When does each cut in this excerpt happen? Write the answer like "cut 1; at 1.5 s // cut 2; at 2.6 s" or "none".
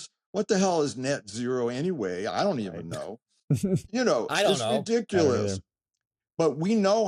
none